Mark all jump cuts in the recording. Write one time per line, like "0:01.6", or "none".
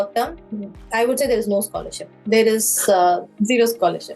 none